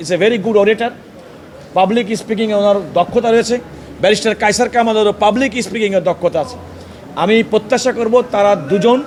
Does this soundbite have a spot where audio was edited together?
no; 0 cuts

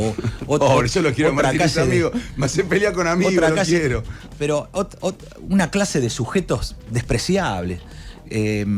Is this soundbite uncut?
yes; 0 cuts

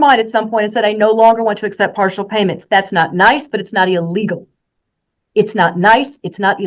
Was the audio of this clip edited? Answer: no; 0 cuts

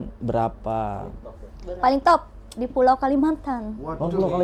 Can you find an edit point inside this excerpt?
no; 0 cuts

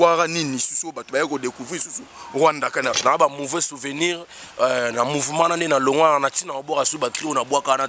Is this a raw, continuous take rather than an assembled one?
no; 1 cut; at 2.9 s

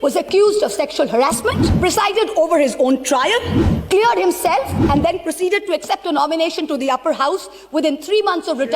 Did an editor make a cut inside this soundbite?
yes; 1 cut; at 1.7 s

